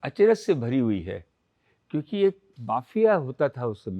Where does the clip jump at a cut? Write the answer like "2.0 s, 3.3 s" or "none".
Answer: 2.6 s